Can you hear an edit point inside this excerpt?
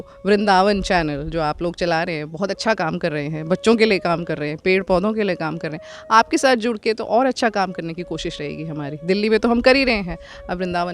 no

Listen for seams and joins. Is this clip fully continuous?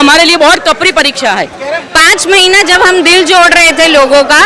no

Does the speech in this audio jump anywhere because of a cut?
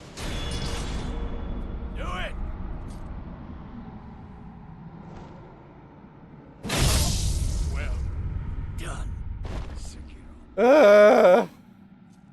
no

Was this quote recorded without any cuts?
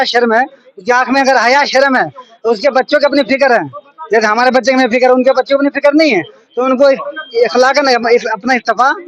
yes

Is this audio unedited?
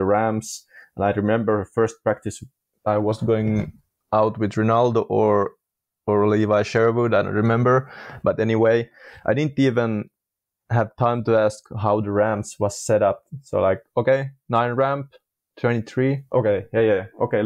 yes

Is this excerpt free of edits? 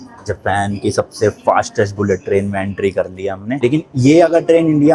no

